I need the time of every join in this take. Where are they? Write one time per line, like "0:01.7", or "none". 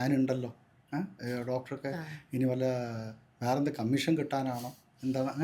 none